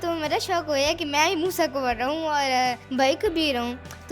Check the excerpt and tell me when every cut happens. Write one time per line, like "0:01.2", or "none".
0:02.8